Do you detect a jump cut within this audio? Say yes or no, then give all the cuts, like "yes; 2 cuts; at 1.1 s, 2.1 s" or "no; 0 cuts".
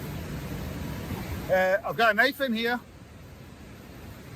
yes; 1 cut; at 1.1 s